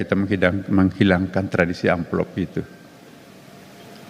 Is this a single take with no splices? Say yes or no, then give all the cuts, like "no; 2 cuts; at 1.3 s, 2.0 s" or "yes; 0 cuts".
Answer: yes; 0 cuts